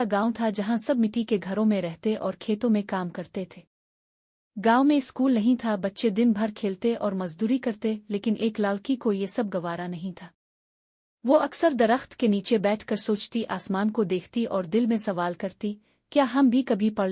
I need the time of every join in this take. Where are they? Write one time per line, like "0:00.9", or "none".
0:01.0